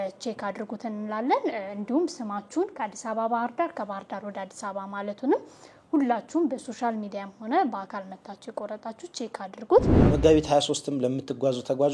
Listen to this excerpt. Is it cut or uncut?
cut